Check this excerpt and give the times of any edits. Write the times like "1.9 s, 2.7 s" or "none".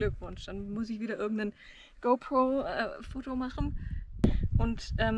4.2 s